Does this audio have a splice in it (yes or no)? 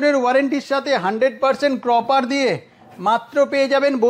no